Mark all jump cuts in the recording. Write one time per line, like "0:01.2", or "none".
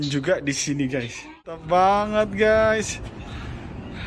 0:01.6